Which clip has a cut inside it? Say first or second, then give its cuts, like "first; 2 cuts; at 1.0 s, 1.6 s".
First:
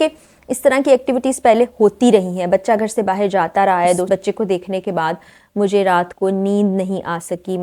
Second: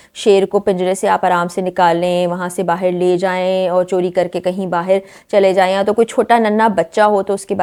first; 1 cut; at 4.1 s